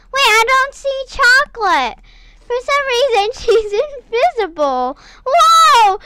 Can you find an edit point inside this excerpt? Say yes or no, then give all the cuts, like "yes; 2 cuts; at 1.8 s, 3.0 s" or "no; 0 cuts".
no; 0 cuts